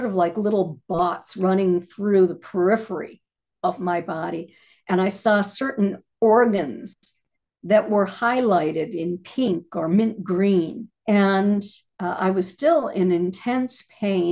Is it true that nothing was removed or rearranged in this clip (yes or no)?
yes